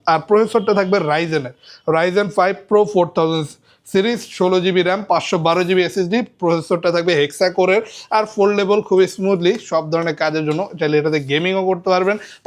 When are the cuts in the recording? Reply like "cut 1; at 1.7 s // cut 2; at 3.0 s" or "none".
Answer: none